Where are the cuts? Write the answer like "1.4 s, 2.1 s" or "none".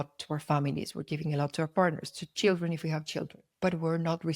3.4 s